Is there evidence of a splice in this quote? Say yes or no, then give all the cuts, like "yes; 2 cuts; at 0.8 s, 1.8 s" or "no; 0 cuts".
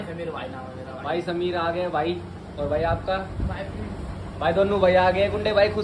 no; 0 cuts